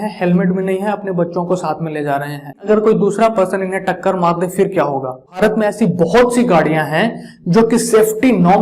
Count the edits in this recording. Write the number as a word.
two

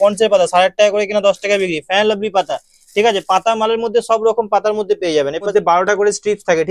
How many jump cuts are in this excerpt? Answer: one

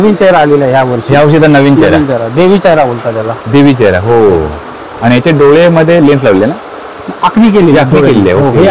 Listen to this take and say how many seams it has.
one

